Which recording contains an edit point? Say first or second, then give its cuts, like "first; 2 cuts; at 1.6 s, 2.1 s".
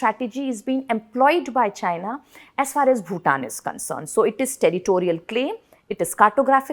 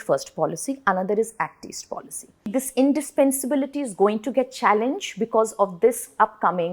second; 1 cut; at 2.5 s